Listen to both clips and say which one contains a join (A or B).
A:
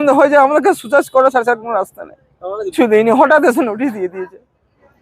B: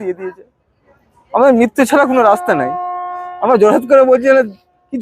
A